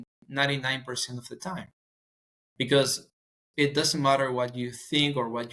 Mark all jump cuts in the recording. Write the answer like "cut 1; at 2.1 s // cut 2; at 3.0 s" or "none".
none